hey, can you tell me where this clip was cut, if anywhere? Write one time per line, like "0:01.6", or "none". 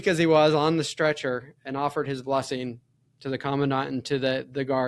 none